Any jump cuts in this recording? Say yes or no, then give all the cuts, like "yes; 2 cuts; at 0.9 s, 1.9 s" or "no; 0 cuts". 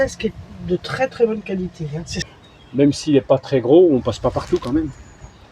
yes; 1 cut; at 2.3 s